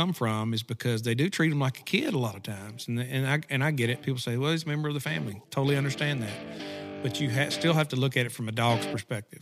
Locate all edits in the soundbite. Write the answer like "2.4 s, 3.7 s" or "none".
none